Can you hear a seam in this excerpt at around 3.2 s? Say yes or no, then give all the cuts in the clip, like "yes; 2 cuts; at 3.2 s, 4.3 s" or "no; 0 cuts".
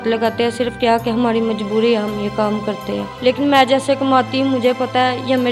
yes; 1 cut; at 3.2 s